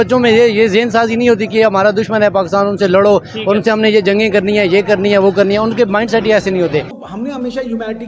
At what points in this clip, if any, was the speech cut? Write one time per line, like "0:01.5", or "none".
0:07.0

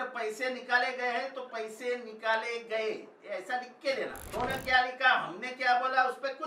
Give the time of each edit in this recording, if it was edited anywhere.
0:04.3

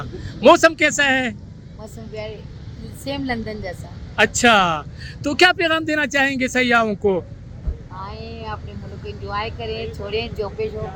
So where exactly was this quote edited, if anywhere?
none

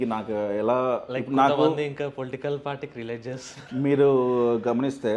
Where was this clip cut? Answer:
none

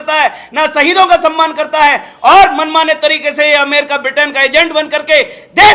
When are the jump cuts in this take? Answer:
none

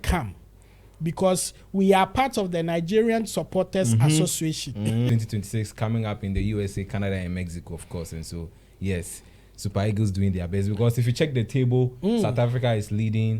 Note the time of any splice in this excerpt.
0:05.1

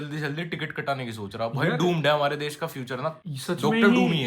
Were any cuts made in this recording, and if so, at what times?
0:03.3

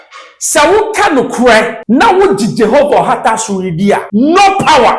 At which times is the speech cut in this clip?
0:01.8
0:04.1

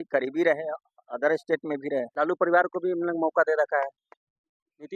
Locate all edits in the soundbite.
0:02.1

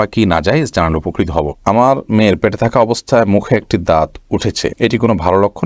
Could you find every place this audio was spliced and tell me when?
0:01.6

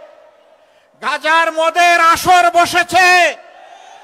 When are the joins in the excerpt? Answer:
none

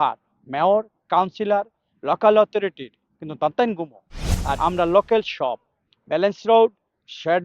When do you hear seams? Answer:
0:04.6

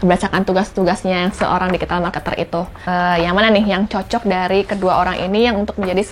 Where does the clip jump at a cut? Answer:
none

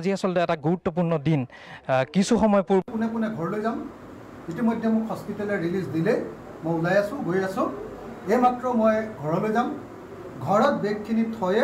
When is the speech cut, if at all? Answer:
0:02.8

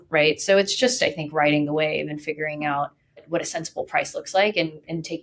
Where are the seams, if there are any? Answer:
none

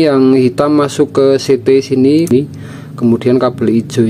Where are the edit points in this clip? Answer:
0:02.3

